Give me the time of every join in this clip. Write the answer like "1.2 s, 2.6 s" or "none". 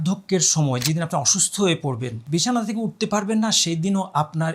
2.1 s